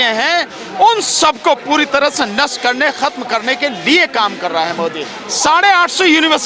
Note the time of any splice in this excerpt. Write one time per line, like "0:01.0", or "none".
0:05.2